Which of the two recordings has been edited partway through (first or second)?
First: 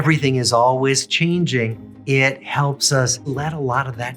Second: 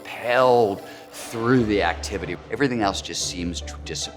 first